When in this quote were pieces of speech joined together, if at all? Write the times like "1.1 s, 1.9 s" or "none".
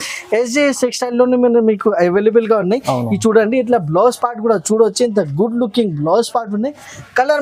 none